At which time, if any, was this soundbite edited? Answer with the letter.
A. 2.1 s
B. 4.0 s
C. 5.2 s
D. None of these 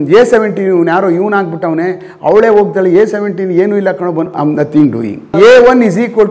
C